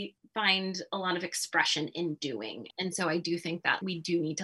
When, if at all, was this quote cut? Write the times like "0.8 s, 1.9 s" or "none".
2.7 s